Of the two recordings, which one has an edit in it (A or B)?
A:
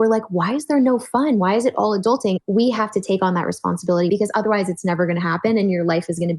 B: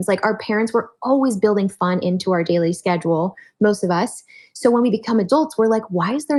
A